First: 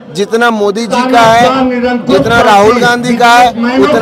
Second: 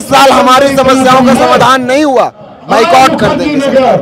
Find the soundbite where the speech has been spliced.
second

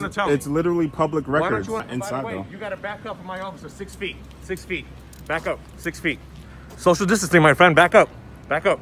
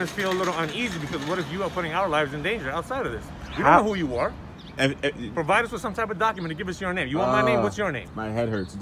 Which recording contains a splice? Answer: first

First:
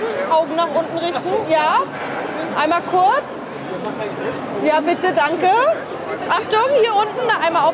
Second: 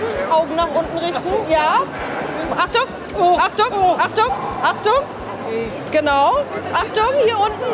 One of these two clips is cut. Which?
second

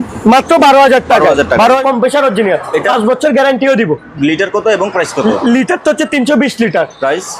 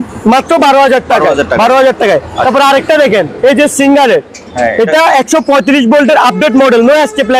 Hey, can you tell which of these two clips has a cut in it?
first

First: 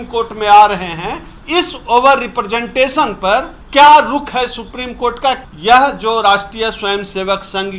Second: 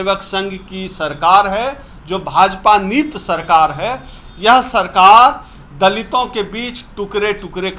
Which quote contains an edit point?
first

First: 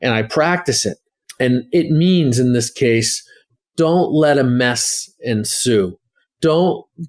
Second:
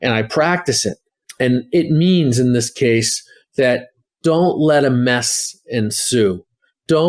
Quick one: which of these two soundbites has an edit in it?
first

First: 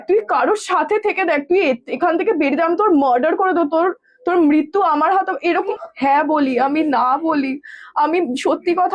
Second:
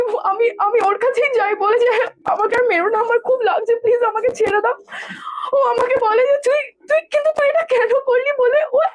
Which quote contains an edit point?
first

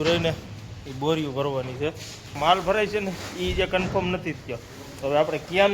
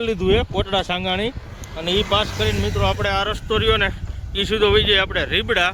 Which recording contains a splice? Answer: first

